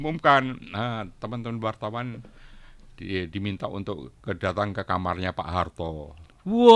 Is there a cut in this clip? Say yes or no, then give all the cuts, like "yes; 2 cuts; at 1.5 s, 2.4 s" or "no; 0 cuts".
no; 0 cuts